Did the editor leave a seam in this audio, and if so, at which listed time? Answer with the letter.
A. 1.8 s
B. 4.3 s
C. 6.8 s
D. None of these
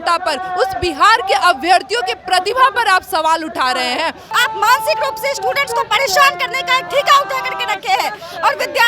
B